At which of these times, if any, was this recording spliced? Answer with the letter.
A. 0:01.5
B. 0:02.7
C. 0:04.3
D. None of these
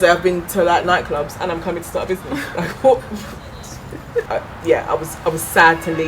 C